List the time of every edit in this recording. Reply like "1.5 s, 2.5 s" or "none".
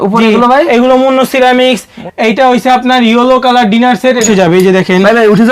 1.9 s, 4.3 s